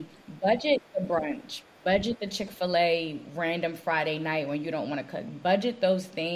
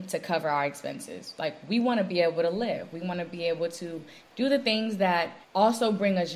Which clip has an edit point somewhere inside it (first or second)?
second